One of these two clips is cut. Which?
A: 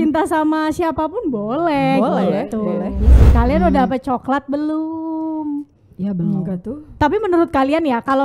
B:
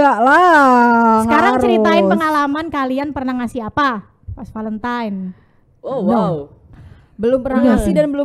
A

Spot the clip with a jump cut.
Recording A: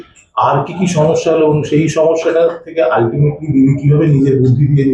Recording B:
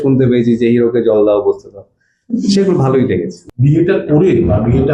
B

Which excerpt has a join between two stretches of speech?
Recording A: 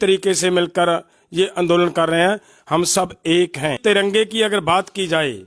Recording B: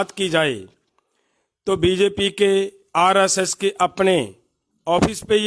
A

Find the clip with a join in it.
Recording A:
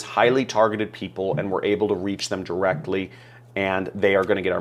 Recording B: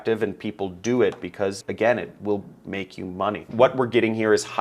B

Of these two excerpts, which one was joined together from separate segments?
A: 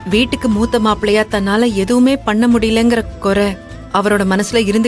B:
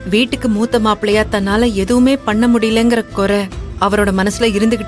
B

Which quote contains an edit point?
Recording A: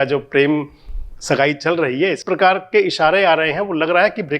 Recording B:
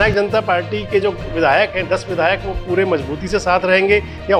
A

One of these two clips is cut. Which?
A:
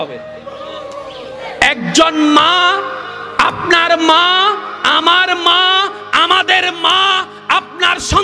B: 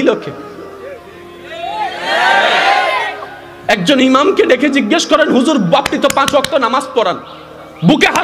A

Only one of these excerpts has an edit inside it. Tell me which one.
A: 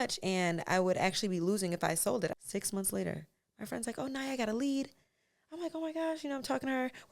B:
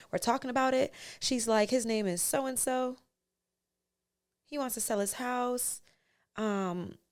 A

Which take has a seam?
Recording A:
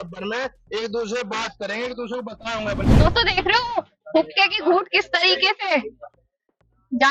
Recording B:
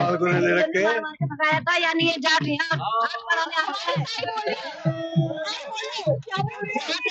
A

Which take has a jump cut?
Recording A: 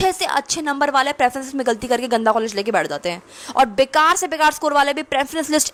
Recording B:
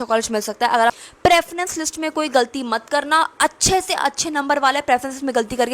B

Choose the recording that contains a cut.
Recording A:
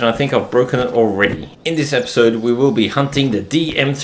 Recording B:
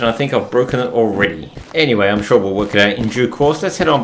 A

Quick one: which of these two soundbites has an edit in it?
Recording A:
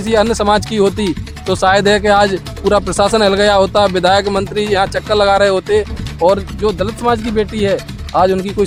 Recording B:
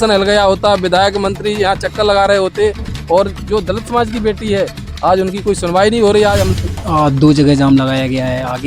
B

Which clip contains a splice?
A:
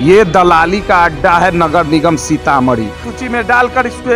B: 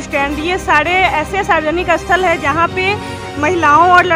A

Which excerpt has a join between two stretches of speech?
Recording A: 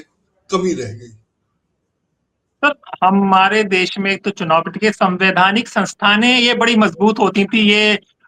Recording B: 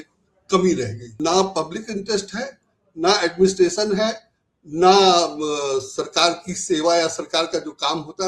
B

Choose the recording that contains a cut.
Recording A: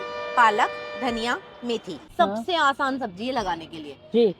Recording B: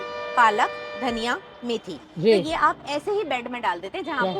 A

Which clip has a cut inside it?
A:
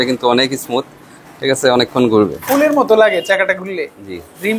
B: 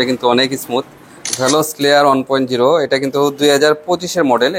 B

